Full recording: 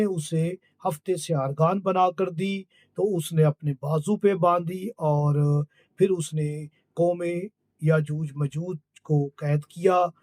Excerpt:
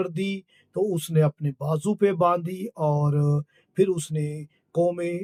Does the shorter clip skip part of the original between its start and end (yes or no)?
no